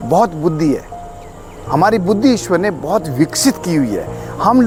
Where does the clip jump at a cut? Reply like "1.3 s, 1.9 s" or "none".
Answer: none